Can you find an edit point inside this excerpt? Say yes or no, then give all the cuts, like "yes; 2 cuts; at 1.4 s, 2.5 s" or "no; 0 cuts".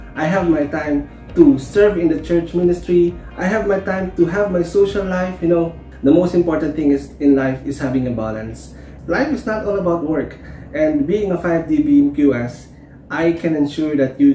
no; 0 cuts